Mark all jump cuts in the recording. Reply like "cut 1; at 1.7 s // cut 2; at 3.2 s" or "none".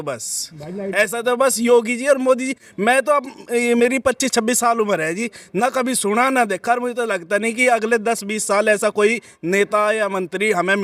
none